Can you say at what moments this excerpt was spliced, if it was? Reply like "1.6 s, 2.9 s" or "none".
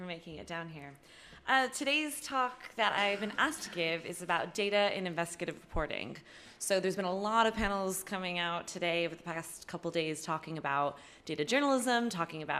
none